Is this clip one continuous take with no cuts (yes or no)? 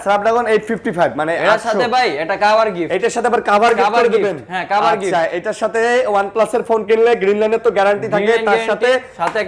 yes